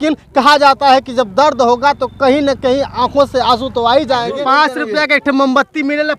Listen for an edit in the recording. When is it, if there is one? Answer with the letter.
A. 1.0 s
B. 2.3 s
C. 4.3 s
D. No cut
C